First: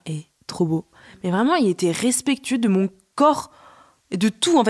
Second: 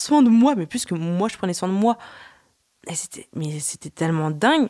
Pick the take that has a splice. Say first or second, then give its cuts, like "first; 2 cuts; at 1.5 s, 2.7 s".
first; 2 cuts; at 0.9 s, 3.0 s